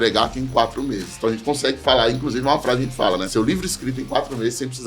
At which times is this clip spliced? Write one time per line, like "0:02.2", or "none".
0:03.3